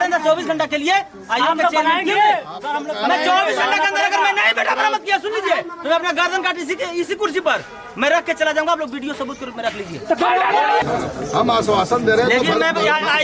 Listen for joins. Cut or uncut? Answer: cut